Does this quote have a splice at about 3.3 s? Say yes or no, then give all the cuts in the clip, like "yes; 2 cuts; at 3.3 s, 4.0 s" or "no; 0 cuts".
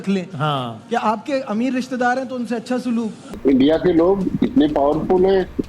yes; 1 cut; at 3.3 s